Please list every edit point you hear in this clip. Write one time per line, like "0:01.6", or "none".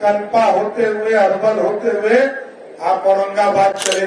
none